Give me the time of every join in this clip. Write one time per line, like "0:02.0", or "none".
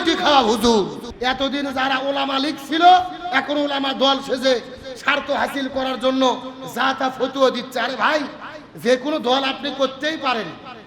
0:01.0